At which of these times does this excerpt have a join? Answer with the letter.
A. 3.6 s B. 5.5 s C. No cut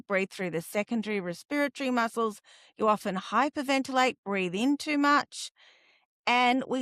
C